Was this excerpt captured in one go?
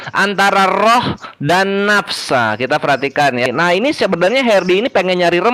no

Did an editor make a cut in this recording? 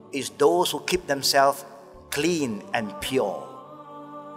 yes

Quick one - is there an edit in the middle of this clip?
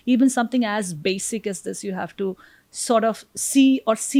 no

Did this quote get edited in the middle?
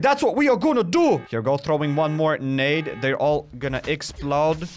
yes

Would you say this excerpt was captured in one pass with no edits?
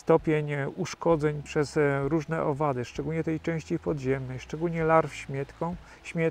no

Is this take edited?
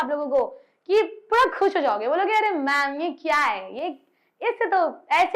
no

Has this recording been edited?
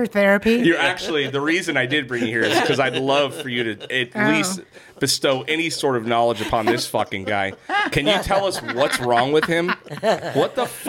no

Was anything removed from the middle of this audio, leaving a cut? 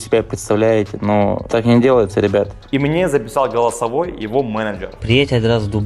yes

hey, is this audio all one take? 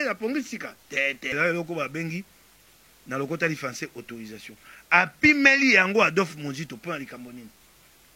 no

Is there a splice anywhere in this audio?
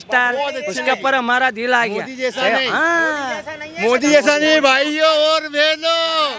no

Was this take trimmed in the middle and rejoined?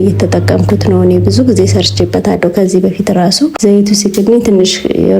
yes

